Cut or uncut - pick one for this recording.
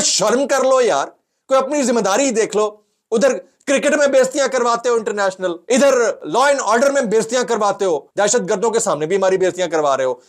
cut